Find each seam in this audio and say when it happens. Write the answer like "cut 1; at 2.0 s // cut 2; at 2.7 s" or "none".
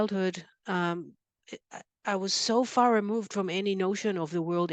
none